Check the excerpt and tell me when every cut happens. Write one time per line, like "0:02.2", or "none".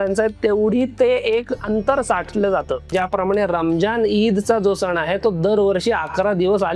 0:02.9